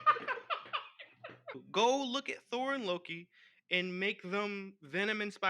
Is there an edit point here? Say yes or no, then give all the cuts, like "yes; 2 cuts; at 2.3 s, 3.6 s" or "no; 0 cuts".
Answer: yes; 1 cut; at 1.6 s